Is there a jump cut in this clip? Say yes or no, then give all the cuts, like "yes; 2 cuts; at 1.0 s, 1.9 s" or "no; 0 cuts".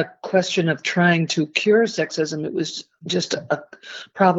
no; 0 cuts